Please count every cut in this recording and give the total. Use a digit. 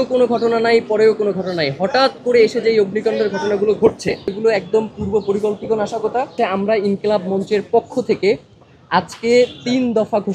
2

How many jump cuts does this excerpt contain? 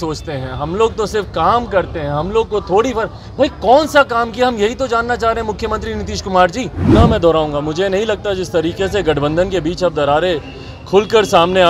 1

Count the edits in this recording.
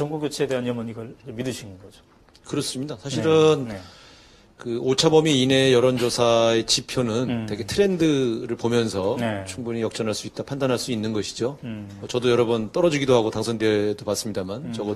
0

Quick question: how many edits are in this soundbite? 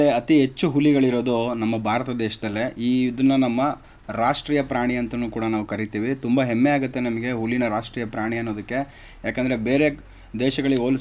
0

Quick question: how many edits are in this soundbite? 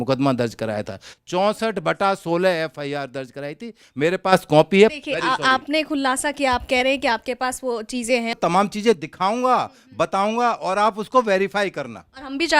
2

